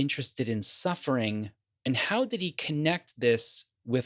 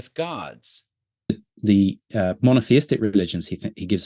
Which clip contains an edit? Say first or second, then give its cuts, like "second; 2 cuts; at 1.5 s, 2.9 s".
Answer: second; 1 cut; at 1.3 s